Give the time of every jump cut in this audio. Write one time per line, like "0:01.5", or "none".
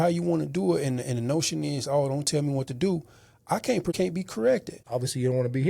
0:03.9
0:04.8